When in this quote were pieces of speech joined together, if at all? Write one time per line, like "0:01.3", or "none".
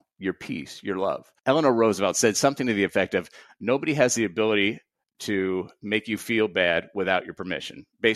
0:01.3